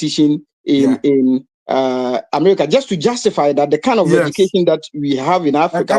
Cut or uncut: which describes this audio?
uncut